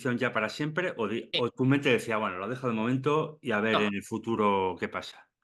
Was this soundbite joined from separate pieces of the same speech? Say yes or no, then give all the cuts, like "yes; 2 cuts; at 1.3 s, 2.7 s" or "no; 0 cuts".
no; 0 cuts